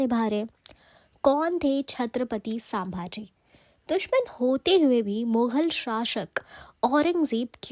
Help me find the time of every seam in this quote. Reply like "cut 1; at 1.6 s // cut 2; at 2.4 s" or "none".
none